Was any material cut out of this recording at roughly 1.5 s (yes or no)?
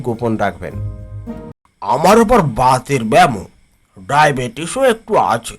yes